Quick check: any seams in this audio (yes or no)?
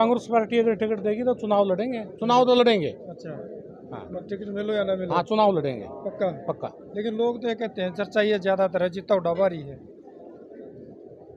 no